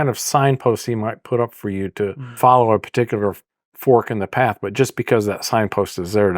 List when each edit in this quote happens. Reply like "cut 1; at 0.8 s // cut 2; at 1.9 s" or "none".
cut 1; at 2.4 s